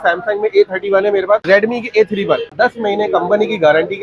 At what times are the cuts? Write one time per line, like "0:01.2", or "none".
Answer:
0:01.4
0:02.5